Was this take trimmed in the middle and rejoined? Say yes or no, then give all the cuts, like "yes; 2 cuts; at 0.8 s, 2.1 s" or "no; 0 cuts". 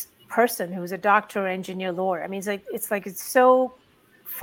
no; 0 cuts